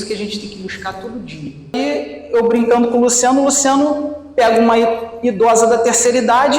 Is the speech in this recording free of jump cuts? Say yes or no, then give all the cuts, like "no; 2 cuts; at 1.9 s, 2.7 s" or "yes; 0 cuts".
no; 1 cut; at 1.8 s